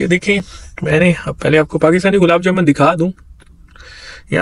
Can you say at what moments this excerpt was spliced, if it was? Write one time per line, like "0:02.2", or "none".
none